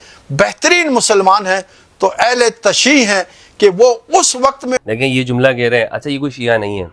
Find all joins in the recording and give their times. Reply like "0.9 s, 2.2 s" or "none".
4.9 s

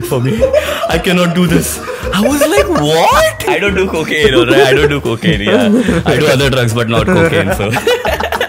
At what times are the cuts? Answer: 3.5 s

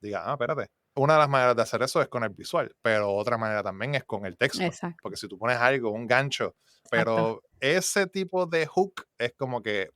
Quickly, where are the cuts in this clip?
6.9 s

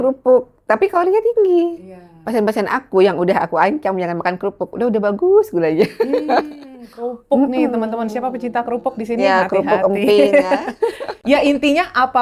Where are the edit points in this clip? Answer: none

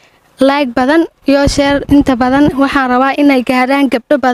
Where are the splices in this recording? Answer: none

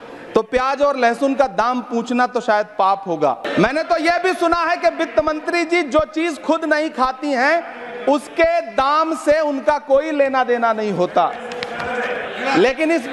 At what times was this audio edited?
3.5 s

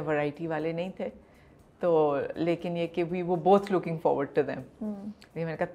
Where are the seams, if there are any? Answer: none

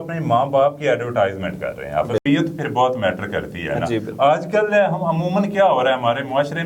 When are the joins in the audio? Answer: 2.2 s

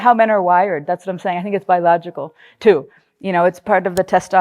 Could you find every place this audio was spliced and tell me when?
none

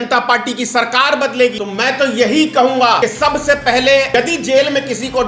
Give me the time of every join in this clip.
1.6 s, 3.0 s, 4.1 s

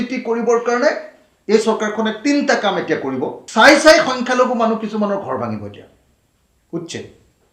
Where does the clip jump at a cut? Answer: 3.4 s

